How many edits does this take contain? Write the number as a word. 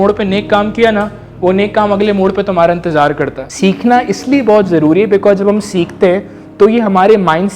one